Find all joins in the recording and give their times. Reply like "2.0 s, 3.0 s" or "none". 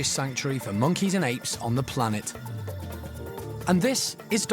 2.3 s, 3.6 s